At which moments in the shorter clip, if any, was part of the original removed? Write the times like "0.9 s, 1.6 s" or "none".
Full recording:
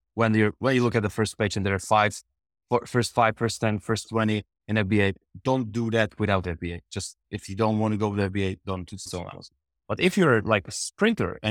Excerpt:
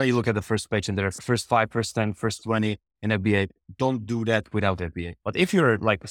1.2 s, 5.1 s